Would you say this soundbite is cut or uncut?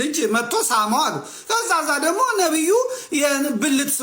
uncut